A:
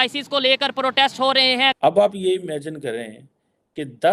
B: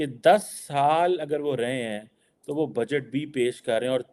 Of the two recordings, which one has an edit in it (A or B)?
A